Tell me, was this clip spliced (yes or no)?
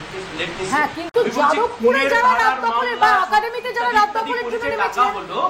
no